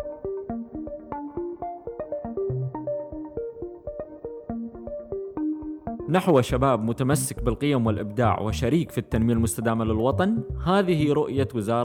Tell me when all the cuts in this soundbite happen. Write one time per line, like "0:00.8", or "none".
0:06.0